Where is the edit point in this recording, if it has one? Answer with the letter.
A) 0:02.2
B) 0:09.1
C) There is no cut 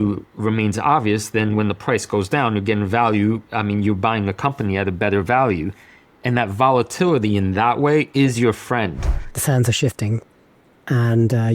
B